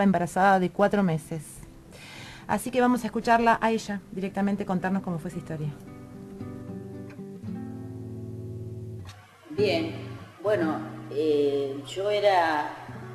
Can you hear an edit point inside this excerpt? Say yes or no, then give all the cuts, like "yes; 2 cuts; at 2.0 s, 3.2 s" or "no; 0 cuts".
no; 0 cuts